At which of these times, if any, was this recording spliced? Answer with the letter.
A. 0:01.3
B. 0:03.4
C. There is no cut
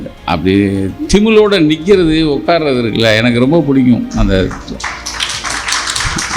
C